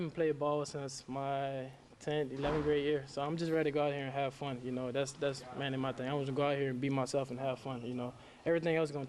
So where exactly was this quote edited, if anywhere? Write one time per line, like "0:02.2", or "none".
none